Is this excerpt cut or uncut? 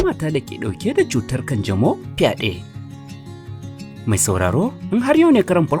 uncut